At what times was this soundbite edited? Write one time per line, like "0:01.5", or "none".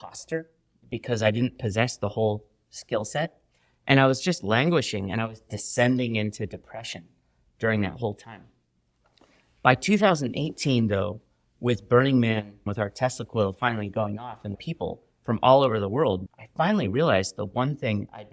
0:12.6
0:14.6
0:16.3